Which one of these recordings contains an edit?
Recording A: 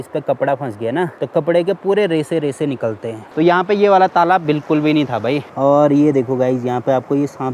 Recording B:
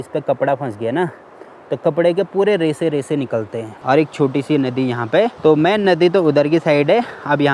A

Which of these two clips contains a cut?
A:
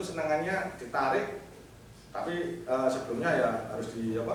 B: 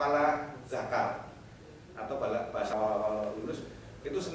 B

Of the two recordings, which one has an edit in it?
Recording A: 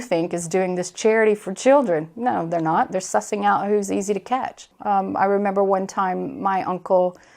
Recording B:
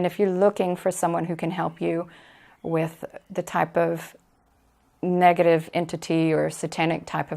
A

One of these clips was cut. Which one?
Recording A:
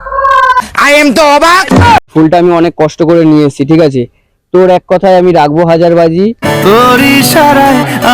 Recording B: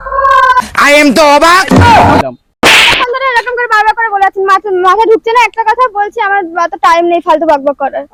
A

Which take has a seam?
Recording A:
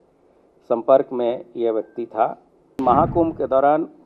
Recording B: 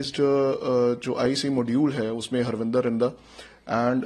A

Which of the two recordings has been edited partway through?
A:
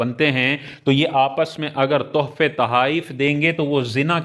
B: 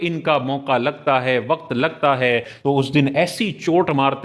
B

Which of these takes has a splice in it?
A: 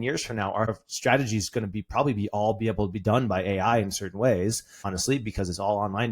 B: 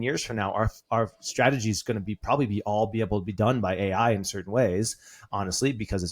A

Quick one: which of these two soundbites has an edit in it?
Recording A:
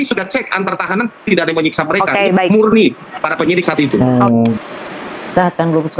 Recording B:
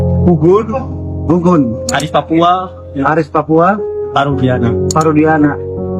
A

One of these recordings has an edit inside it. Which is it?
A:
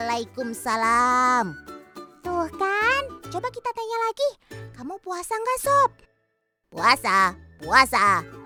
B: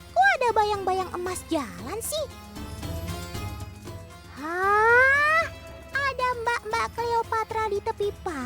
B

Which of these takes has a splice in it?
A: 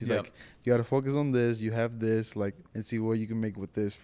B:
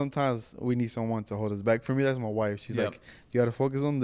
A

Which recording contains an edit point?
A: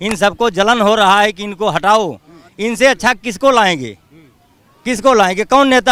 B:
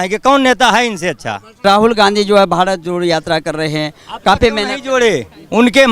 B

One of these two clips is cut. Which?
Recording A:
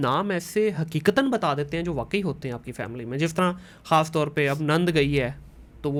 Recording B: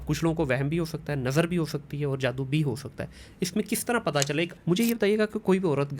B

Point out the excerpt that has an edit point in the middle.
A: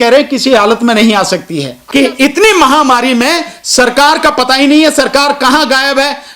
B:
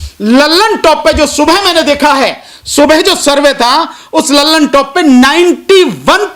A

